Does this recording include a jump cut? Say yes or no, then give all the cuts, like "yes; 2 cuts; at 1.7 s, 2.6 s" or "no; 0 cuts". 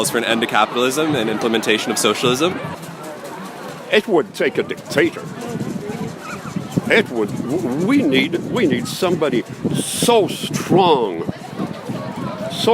yes; 1 cut; at 2.7 s